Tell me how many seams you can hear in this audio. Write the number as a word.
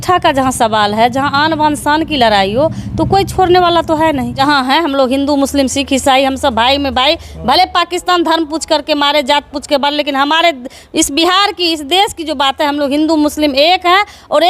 one